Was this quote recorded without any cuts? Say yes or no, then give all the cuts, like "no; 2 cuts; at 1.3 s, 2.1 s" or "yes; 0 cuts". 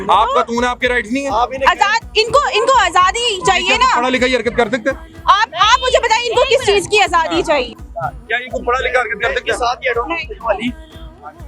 yes; 0 cuts